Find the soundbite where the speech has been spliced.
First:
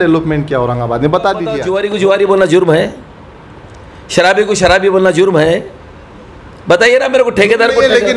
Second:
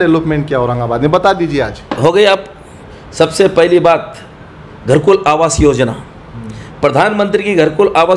first; 1 cut; at 1.7 s

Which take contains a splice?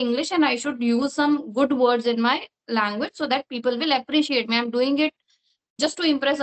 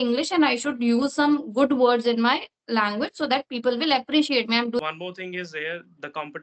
second; 1 cut; at 4.8 s

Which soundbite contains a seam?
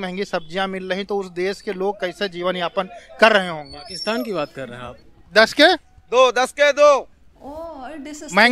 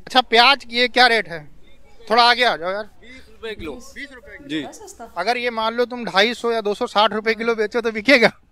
first; 1 cut; at 4.9 s

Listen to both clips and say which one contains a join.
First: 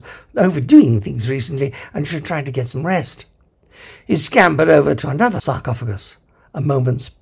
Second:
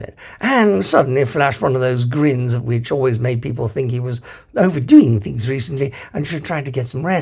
first; 1 cut; at 5.4 s

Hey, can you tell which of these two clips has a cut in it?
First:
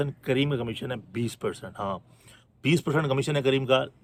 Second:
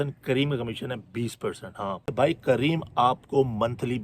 second; 1 cut; at 2.1 s

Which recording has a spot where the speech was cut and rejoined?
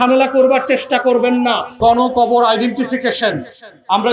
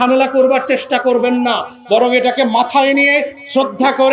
first; 1 cut; at 1.8 s

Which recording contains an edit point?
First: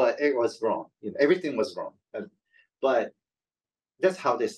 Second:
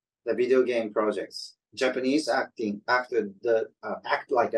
second; 1 cut; at 1.6 s

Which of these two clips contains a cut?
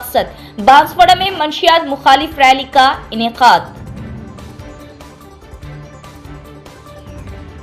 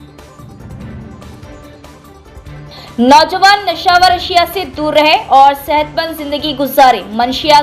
second; 1 cut; at 1.5 s

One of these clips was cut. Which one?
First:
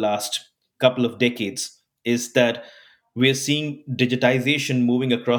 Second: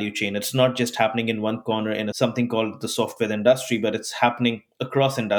second; 1 cut; at 2.1 s

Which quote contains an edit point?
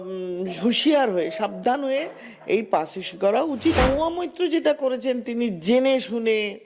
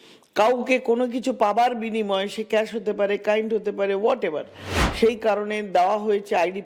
first; 1 cut; at 3.8 s

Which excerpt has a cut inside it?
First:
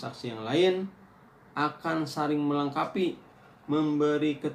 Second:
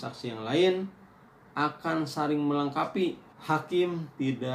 second; 1 cut; at 3.3 s

